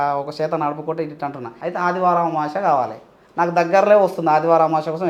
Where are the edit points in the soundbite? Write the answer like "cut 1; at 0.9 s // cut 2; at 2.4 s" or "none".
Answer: cut 1; at 1.5 s